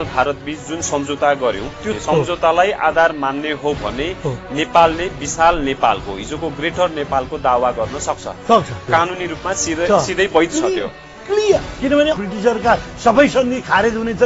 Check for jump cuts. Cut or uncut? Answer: uncut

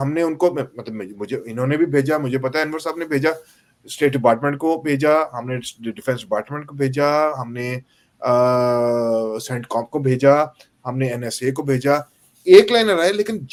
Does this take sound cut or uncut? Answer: uncut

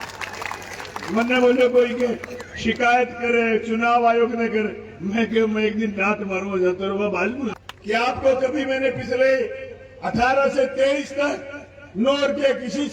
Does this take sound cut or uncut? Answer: cut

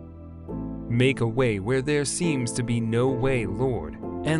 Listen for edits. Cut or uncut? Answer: cut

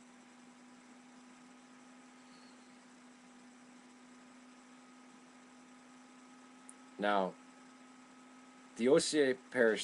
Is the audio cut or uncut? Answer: cut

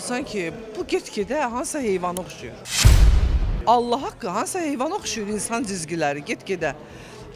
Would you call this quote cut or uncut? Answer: cut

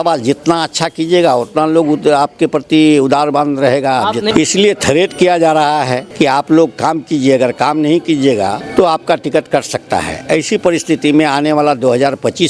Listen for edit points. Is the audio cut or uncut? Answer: cut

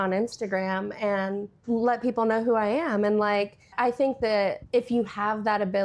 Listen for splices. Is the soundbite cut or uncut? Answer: cut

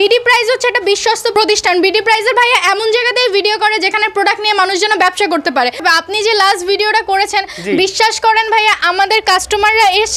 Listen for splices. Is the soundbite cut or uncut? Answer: cut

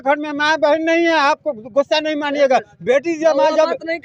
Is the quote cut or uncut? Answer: uncut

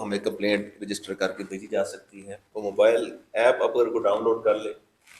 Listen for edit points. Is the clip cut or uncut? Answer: cut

